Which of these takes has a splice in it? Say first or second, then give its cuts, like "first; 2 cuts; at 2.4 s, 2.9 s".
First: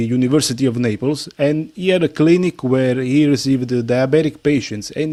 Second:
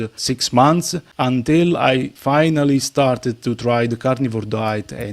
second; 1 cut; at 2.1 s